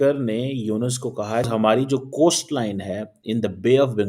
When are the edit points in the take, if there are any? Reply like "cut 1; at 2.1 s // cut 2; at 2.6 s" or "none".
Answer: cut 1; at 1.5 s